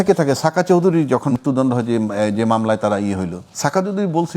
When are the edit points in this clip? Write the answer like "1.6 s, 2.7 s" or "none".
1.3 s, 3.4 s